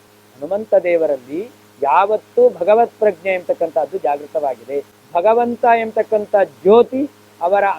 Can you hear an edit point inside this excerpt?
yes; 1 cut; at 5.0 s

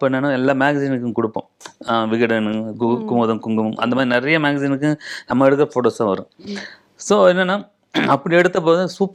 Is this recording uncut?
yes; 0 cuts

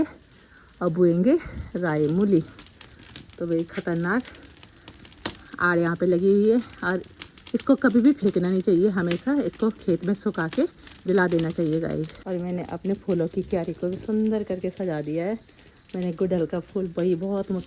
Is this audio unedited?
no; 1 cut; at 12.1 s

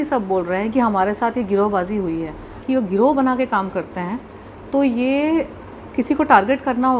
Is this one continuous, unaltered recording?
no; 1 cut; at 2.6 s

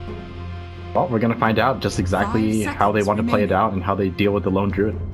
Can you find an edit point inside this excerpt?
yes; 1 cut; at 0.9 s

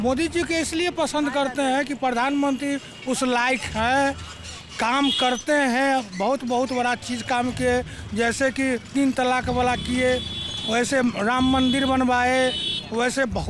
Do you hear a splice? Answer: no; 0 cuts

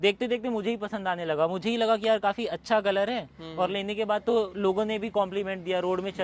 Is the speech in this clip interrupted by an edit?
no; 0 cuts

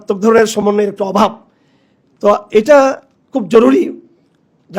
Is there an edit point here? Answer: no; 0 cuts

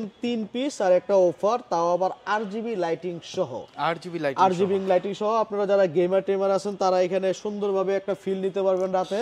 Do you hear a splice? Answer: no; 0 cuts

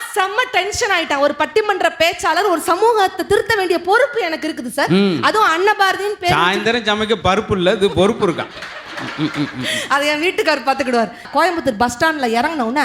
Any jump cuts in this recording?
yes; 1 cut; at 11.3 s

